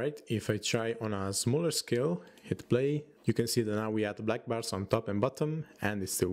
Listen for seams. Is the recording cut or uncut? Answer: cut